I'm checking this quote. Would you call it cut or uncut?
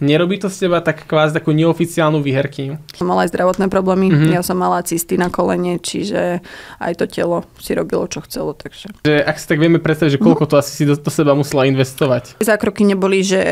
cut